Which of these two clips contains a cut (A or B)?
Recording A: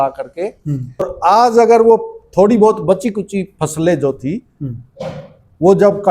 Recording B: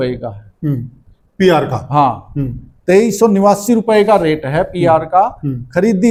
A